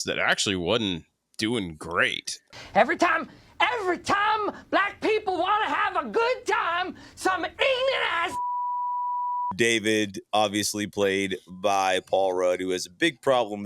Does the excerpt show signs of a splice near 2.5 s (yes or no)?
no